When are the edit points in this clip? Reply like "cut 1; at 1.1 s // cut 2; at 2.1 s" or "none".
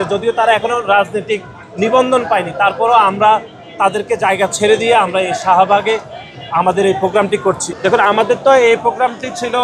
cut 1; at 7.7 s

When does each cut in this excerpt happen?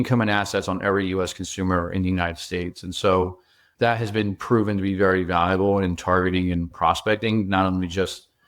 cut 1; at 6.7 s

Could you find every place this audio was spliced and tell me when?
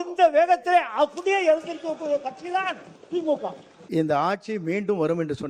cut 1; at 3.7 s

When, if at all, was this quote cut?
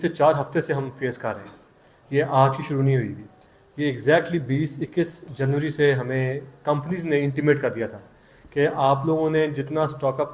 none

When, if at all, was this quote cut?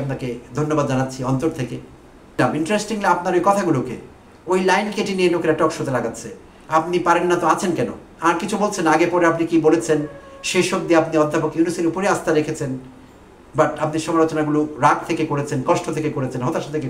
cut 1; at 2.4 s

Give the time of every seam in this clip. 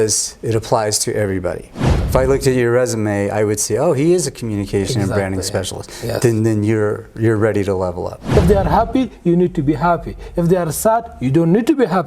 cut 1; at 2.0 s // cut 2; at 8.2 s

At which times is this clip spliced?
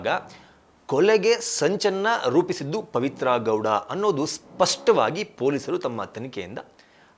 none

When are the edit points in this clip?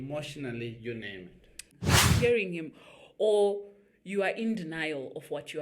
cut 1; at 1.7 s

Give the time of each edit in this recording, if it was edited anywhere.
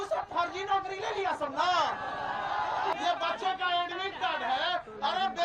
cut 1; at 2.9 s

